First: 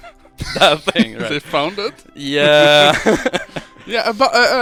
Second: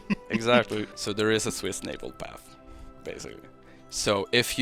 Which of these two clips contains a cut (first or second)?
second